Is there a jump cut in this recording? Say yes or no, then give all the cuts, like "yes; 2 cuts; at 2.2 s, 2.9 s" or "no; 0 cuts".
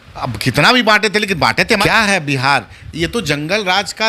yes; 1 cut; at 1.8 s